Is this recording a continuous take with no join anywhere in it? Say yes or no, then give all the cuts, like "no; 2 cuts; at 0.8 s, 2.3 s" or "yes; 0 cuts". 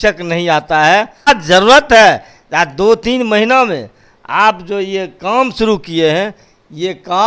no; 1 cut; at 1.3 s